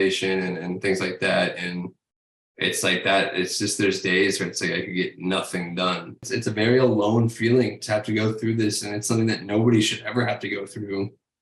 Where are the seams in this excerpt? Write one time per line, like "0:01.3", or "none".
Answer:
0:06.3